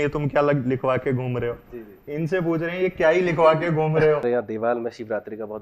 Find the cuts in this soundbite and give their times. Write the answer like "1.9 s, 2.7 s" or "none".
4.2 s